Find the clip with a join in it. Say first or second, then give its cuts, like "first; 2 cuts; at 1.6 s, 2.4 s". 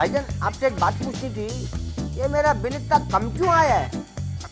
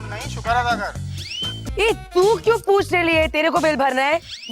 second; 1 cut; at 1.7 s